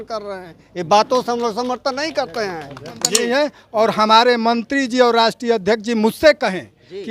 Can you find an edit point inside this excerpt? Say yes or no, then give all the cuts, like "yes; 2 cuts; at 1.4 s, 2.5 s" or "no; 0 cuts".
yes; 1 cut; at 3.0 s